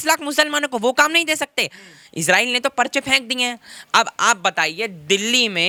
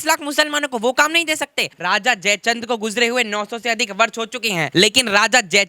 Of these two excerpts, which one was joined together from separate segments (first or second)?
second